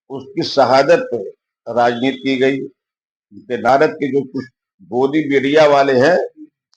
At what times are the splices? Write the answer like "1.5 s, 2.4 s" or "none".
3.7 s